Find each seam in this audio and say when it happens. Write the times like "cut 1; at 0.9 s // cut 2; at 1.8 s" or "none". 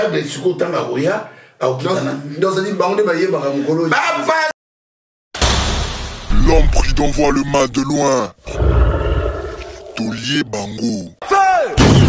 cut 1; at 4.6 s